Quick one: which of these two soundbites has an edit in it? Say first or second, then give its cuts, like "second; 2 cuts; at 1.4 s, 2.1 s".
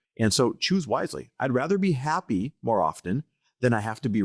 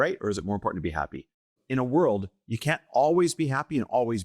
second; 1 cut; at 1.5 s